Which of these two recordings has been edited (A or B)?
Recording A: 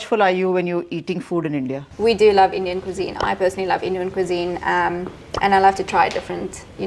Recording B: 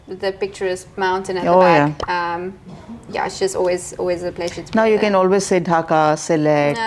A